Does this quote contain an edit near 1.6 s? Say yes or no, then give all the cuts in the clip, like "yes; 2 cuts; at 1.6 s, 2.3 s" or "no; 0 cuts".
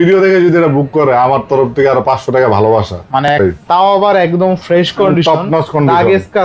no; 1 cut; at 3.3 s